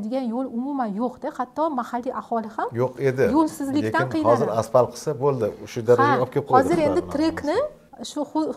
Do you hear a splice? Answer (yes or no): no